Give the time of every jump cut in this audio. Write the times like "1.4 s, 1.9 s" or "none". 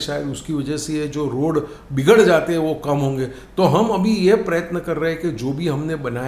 none